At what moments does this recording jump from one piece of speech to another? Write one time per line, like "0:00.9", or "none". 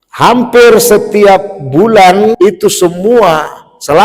0:02.8